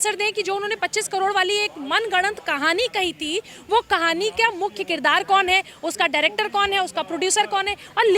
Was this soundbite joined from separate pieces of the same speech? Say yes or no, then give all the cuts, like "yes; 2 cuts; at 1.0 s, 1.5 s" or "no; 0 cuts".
no; 0 cuts